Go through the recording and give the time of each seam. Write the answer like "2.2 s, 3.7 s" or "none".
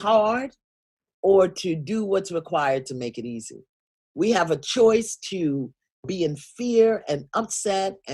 6.1 s

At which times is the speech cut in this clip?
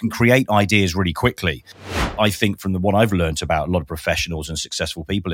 1.7 s

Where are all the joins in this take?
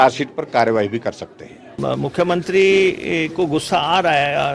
1.8 s

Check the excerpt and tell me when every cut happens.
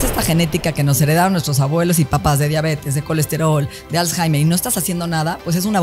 none

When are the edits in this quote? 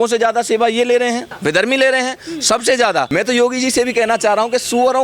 1.3 s, 3.1 s

